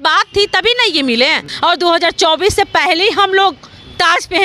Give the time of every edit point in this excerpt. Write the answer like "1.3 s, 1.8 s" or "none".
1.5 s